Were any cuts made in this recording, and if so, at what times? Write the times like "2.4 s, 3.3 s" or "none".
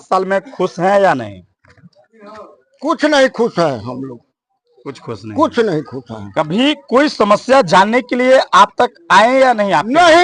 none